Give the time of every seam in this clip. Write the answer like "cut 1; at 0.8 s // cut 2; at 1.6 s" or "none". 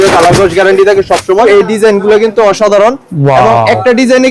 cut 1; at 1.4 s